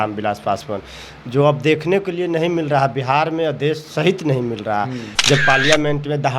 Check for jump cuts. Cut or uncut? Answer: cut